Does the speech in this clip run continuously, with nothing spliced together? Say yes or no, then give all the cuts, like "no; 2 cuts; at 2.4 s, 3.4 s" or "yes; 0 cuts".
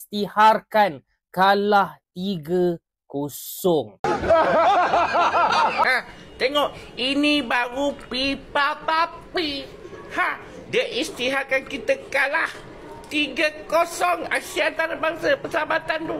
no; 2 cuts; at 3.9 s, 6.0 s